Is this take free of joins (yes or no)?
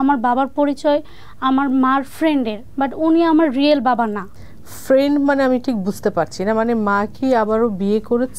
yes